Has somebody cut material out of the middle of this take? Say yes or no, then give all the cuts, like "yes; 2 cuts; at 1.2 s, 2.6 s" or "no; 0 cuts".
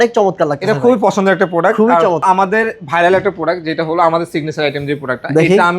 yes; 1 cut; at 2.2 s